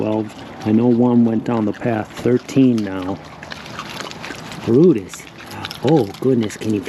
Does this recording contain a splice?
no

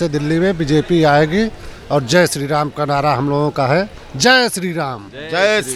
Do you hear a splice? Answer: no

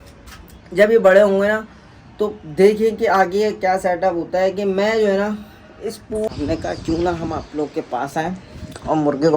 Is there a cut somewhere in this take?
yes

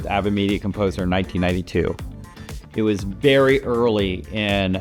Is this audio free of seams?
yes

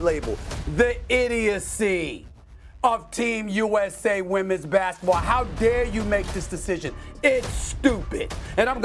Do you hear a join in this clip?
no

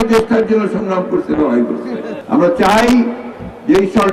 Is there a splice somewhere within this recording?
yes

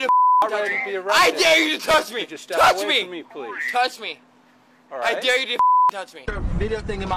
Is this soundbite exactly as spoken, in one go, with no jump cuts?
no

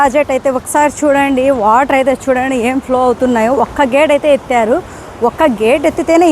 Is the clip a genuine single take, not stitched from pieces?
yes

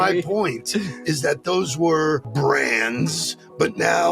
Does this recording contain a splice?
yes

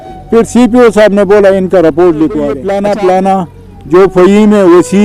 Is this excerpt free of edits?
no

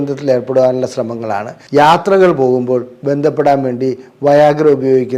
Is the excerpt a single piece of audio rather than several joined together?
no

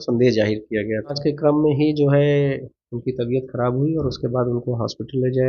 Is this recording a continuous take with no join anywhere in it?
no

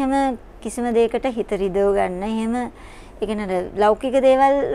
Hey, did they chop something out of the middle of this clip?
no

